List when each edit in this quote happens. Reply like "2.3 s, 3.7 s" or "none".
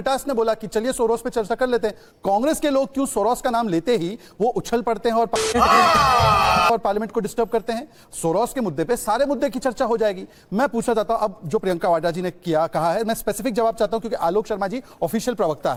none